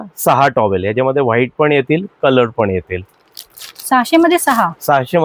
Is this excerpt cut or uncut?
uncut